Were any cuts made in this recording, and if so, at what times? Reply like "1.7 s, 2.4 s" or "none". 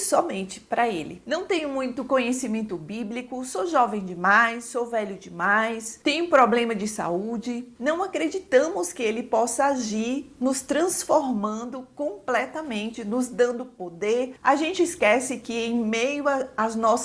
1.2 s, 7.7 s, 14.3 s